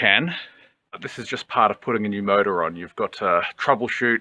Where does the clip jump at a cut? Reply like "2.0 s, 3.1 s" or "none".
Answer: 1.1 s